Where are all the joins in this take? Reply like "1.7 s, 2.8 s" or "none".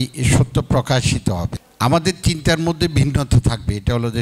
1.5 s

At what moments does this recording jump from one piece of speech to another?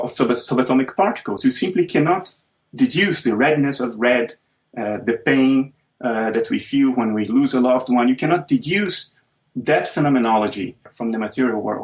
10.9 s

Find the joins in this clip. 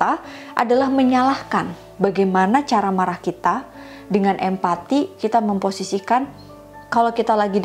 1.8 s

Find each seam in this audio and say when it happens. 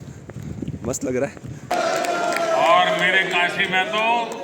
1.7 s

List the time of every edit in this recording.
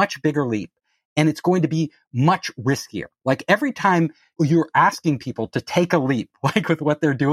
4.2 s

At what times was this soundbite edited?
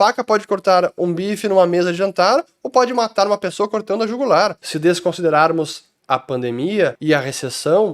4.6 s, 7.0 s

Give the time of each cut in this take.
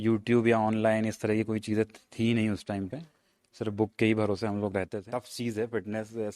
5.0 s

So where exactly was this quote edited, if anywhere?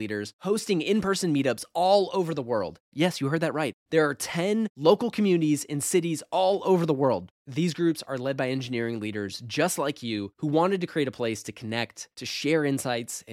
none

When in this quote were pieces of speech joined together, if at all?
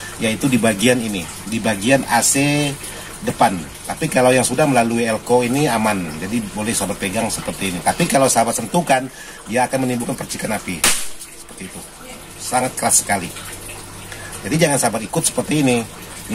none

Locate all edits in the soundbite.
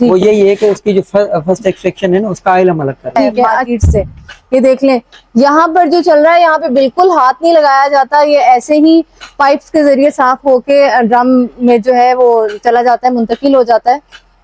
3.6 s

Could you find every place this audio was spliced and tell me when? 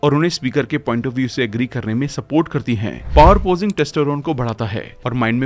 2.9 s

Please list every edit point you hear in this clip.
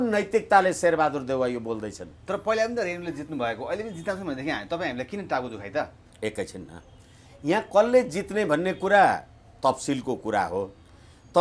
none

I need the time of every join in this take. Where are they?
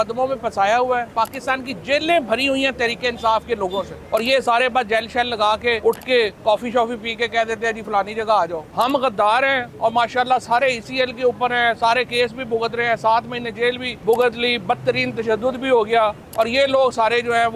1.1 s, 4.0 s, 5.8 s, 8.6 s, 13.9 s, 16.2 s

